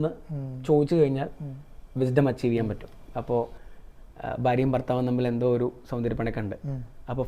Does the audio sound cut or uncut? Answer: cut